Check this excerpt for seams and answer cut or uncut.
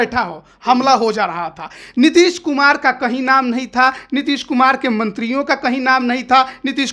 uncut